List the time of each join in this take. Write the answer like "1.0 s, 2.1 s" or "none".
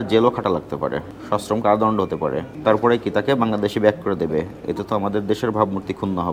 1.1 s, 2.5 s